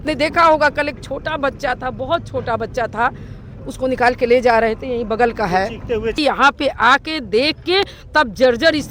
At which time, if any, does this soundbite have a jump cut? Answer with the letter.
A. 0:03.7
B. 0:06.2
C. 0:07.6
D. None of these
B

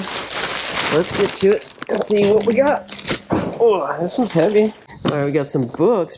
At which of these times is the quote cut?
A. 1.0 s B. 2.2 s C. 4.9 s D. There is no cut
C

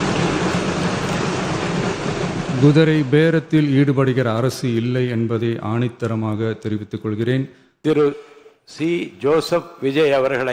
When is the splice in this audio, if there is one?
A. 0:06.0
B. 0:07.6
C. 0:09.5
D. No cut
B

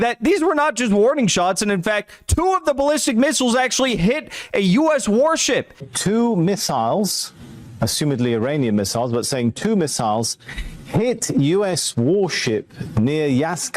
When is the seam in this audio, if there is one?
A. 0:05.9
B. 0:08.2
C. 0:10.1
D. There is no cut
A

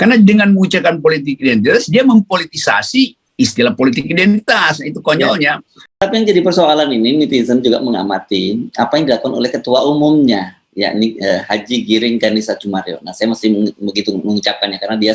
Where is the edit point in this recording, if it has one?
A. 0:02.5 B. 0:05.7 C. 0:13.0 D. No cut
B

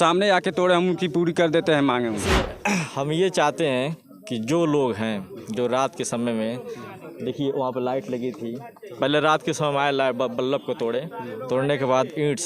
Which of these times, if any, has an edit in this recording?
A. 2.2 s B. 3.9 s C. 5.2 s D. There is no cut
A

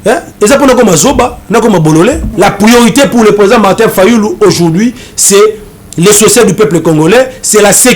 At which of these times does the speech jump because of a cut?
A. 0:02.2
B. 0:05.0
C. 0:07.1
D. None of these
A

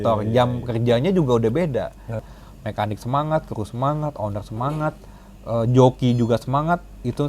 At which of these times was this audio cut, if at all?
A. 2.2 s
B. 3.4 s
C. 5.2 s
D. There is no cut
A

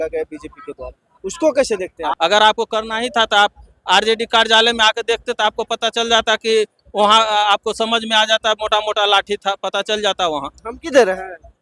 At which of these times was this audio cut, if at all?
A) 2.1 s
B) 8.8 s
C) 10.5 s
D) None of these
A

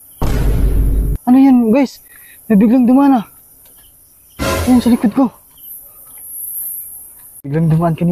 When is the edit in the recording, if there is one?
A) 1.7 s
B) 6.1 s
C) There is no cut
C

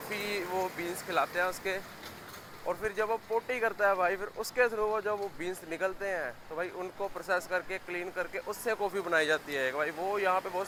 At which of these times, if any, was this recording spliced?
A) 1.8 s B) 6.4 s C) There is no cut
C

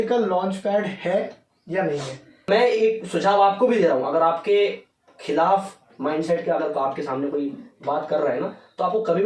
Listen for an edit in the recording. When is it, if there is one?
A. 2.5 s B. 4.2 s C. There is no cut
A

